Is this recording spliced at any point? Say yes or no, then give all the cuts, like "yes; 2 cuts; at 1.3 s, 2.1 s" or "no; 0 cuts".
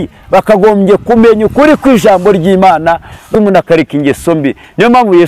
yes; 1 cut; at 3.3 s